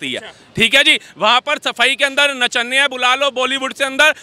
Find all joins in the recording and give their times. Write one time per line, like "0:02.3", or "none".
none